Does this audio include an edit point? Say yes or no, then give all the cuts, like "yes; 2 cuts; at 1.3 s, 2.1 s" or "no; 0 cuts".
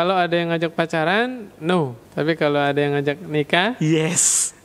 yes; 1 cut; at 2.0 s